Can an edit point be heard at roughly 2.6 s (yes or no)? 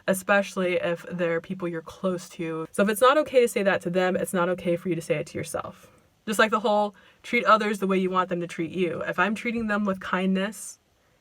yes